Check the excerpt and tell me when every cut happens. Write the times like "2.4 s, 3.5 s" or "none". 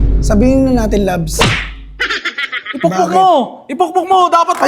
none